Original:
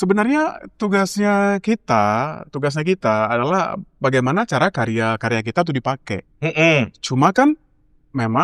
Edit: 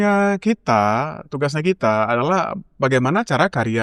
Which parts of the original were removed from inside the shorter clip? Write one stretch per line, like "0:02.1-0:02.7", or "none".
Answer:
none